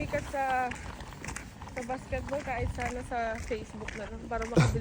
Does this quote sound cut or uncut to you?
uncut